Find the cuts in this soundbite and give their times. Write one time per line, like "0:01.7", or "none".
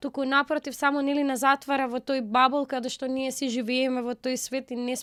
none